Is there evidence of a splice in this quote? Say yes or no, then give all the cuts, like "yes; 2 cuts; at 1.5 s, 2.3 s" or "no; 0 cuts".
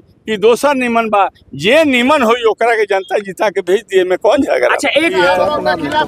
yes; 1 cut; at 5.1 s